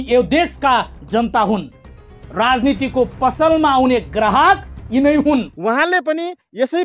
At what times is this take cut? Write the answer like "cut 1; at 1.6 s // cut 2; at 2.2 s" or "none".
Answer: cut 1; at 5.5 s